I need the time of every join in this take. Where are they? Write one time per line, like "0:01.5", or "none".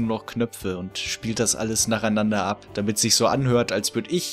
0:02.7

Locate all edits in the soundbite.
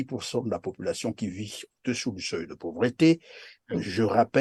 none

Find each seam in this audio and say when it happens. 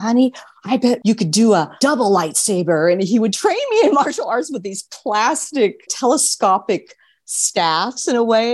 0:01.0
0:01.7
0:05.9

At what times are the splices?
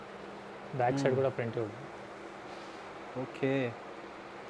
none

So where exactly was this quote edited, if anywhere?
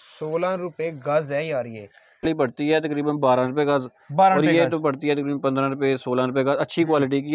0:02.2

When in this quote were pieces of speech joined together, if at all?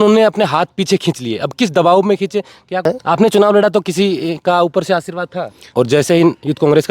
0:02.9
0:05.7

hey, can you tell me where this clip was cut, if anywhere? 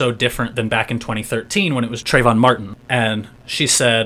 0:02.0
0:02.7

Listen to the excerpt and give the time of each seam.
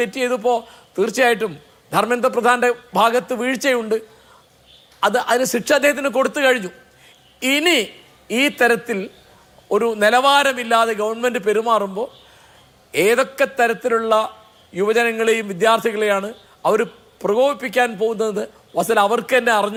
none

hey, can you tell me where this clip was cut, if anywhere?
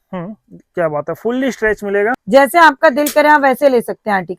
0:02.2

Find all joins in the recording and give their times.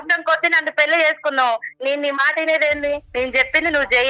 0:01.7
0:03.1

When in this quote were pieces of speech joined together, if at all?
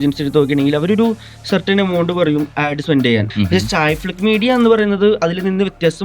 0:03.3

